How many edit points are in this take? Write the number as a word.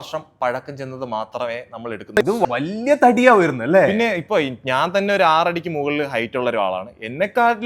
one